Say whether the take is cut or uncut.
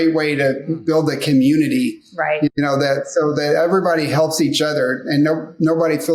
uncut